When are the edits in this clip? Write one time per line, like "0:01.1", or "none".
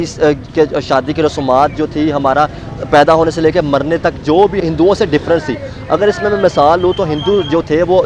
0:04.6